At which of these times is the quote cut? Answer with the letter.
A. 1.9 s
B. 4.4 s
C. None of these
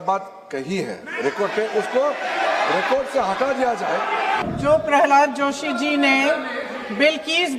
B